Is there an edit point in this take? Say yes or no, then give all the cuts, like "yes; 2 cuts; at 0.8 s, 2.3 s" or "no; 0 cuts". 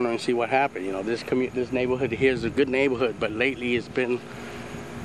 no; 0 cuts